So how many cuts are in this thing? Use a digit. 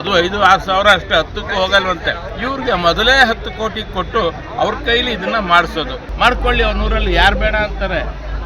2